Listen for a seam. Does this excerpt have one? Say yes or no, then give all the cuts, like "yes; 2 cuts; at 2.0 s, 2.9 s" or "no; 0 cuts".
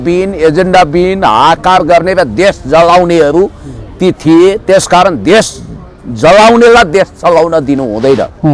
no; 0 cuts